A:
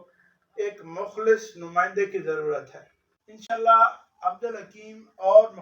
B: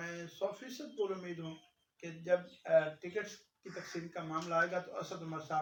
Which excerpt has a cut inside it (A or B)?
A